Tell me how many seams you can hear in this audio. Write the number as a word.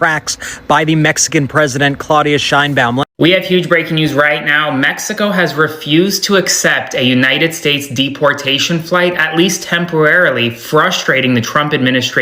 one